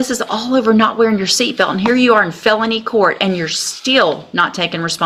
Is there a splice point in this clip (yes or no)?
no